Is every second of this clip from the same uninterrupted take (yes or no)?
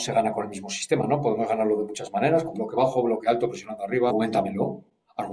no